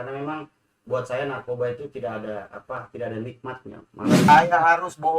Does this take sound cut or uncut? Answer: cut